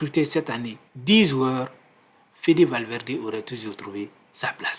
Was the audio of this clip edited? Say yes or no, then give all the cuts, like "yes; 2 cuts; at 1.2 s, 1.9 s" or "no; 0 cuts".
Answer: no; 0 cuts